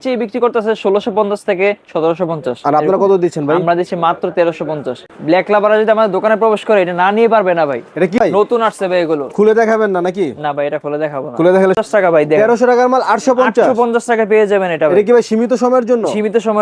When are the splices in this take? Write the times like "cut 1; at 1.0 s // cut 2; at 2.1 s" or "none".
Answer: cut 1; at 5.2 s // cut 2; at 8.2 s // cut 3; at 11.8 s